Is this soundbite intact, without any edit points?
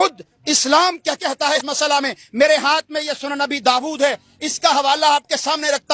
no; 1 cut; at 1.5 s

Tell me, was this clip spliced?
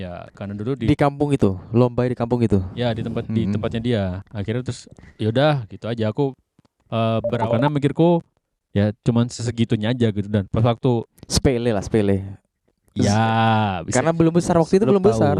yes; 1 cut; at 7.4 s

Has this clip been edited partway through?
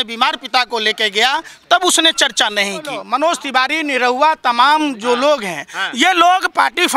yes; 1 cut; at 3.0 s

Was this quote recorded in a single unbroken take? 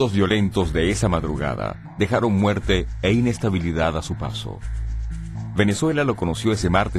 yes; 0 cuts

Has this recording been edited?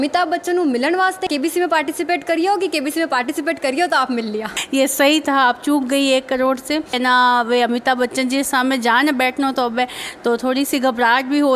yes; 3 cuts; at 1.2 s, 4.5 s, 7.0 s

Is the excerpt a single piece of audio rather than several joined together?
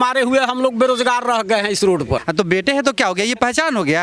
no; 1 cut; at 2.3 s

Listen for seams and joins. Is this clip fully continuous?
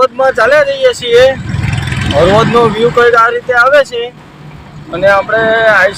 yes; 0 cuts

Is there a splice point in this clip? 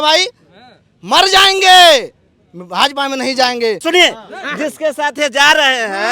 yes; 1 cut; at 3.8 s

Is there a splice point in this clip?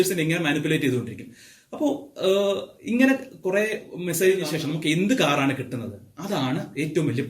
yes; 1 cut; at 4.5 s

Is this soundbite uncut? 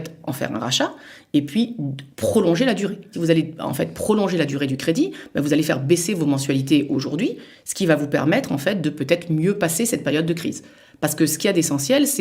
no; 1 cut; at 3.1 s

